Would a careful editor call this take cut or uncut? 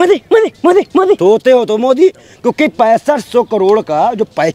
cut